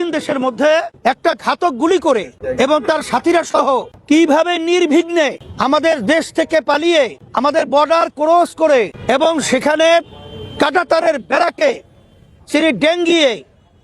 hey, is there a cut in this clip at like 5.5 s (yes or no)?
yes